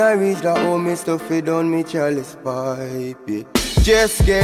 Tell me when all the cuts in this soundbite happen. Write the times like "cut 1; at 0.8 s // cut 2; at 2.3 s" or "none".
none